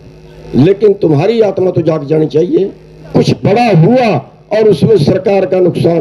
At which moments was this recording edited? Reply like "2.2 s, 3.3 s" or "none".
2.9 s